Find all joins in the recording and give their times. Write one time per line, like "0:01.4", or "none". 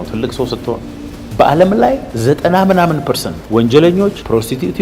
0:01.0